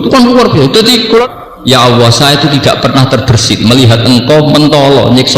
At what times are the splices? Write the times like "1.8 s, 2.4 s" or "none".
1.2 s